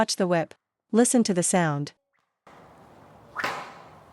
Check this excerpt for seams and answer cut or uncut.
cut